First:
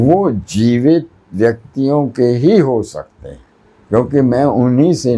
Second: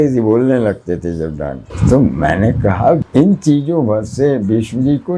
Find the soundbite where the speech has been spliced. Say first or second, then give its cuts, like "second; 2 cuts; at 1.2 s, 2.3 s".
second; 2 cuts; at 1.7 s, 3.0 s